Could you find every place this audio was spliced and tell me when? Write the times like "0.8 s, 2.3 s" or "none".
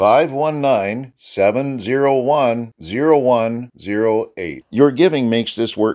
none